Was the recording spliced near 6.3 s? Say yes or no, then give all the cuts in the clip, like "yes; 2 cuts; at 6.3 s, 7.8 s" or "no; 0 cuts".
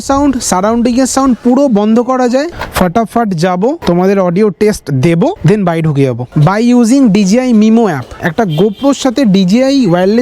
yes; 3 cuts; at 2.5 s, 6.3 s, 8.2 s